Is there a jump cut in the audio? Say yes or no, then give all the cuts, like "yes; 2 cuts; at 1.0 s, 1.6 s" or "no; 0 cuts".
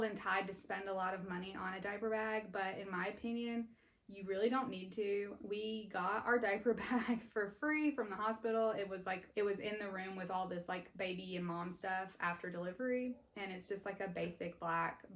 no; 0 cuts